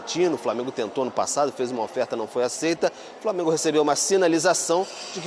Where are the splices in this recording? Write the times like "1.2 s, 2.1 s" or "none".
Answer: none